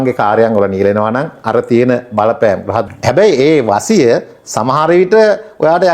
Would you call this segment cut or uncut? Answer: cut